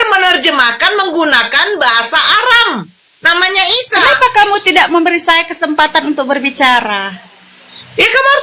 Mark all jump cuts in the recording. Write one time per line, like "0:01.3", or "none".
none